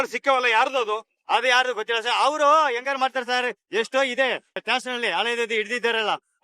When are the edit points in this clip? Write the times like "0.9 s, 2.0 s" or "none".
4.6 s